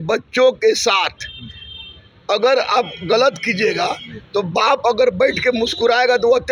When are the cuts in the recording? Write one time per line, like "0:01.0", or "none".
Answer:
none